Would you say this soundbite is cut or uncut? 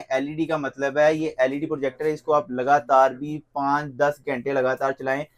uncut